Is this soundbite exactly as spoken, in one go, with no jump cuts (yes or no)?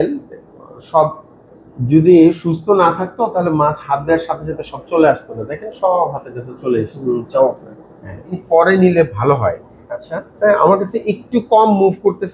no